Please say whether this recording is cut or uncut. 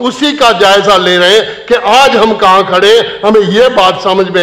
uncut